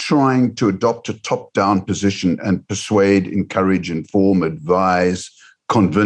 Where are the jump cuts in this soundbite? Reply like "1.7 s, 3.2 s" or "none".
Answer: none